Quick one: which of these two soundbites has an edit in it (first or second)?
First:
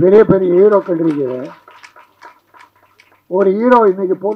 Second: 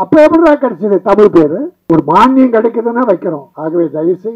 second